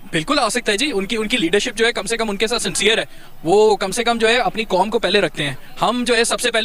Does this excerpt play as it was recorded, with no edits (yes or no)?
yes